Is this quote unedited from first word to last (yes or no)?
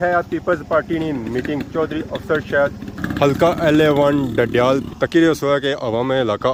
yes